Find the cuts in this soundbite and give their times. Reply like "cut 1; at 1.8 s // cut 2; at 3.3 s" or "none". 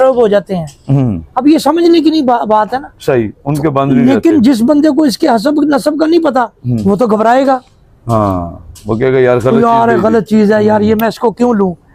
none